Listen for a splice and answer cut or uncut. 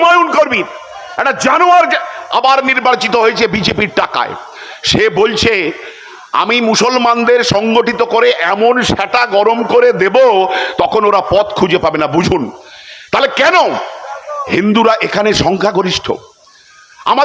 uncut